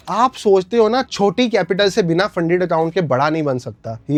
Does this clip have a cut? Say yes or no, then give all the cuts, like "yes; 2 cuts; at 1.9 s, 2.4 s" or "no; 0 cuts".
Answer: no; 0 cuts